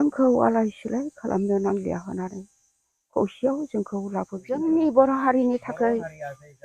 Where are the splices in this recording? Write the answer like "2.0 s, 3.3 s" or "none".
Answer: 4.6 s